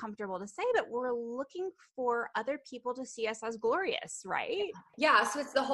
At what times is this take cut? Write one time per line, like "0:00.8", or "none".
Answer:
0:04.8